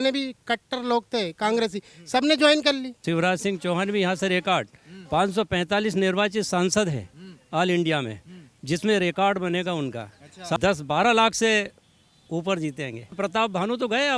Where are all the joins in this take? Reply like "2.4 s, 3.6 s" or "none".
3.0 s, 10.6 s, 13.1 s